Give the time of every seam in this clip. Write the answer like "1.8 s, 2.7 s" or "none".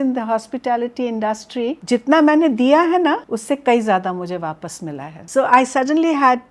1.8 s, 3.3 s, 5.2 s